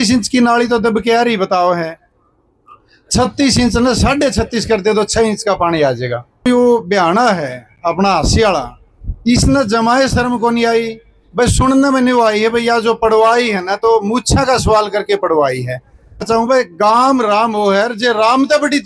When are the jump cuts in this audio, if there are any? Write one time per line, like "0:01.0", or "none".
0:06.4
0:16.2